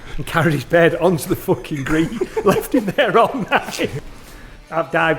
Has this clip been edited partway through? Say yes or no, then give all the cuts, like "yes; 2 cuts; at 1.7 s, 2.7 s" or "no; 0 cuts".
yes; 1 cut; at 4.0 s